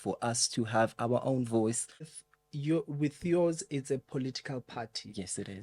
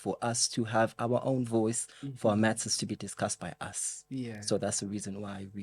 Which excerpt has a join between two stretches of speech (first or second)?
first